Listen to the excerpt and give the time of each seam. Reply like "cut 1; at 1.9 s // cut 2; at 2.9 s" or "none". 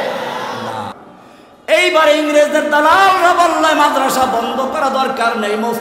cut 1; at 1.0 s